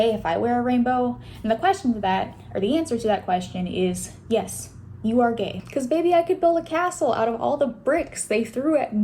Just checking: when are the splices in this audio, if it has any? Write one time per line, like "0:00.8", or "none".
0:05.6

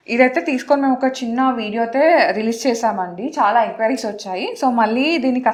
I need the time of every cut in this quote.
none

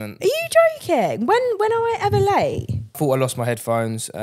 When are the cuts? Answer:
0:03.0

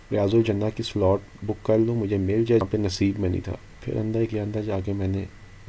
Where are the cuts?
0:02.6

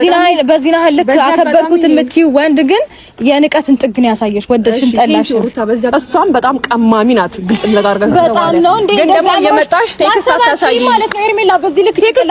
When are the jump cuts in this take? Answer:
0:05.9

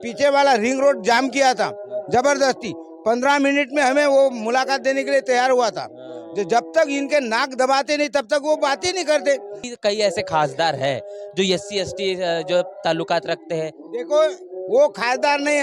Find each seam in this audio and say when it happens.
0:09.7

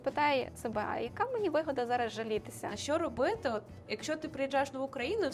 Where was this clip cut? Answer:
0:02.8

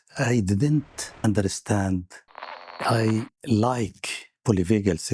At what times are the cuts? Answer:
0:01.2
0:02.8

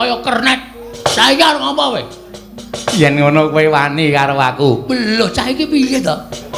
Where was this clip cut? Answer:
0:00.9

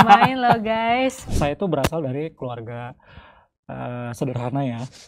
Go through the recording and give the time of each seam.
0:01.3

